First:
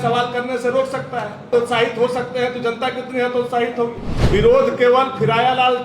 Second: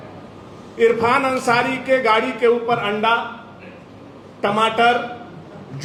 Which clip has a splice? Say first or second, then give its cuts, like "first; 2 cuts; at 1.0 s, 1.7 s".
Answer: first; 2 cuts; at 1.5 s, 4.1 s